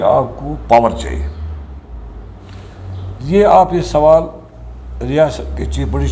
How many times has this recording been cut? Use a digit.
0